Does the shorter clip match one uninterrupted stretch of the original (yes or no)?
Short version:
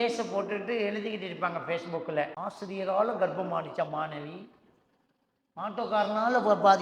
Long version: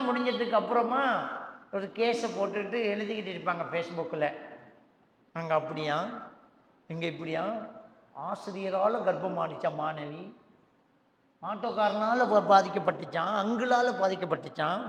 no